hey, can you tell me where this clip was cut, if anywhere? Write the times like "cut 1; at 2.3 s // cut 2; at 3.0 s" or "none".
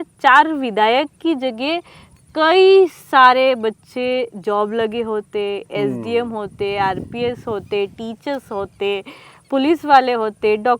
none